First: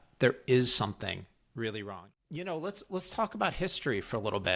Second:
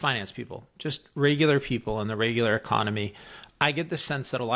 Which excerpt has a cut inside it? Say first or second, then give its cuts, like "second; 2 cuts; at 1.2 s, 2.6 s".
first; 1 cut; at 2.0 s